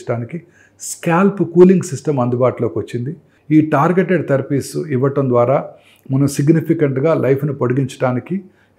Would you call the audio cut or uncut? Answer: cut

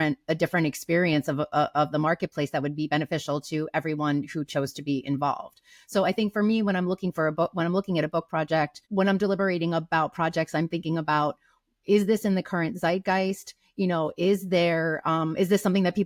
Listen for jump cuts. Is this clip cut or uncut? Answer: uncut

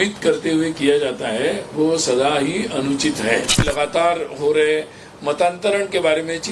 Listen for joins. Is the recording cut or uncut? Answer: cut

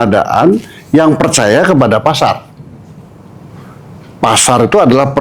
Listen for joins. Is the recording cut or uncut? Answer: uncut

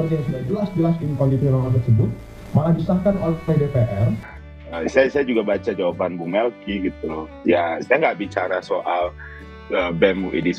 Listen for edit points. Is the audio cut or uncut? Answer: cut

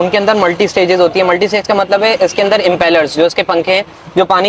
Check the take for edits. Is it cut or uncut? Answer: uncut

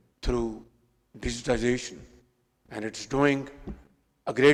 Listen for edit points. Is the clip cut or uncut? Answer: uncut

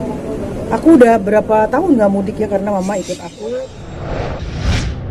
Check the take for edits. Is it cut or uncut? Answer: cut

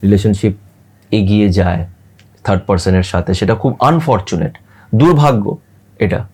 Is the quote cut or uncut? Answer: uncut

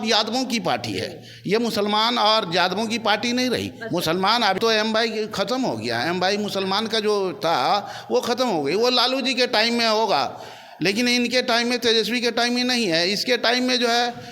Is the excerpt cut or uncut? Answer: cut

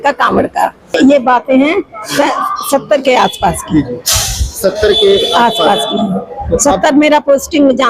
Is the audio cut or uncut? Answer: cut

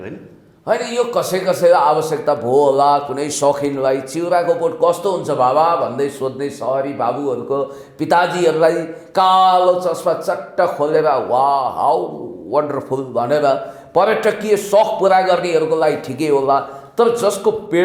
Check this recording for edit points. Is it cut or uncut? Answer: uncut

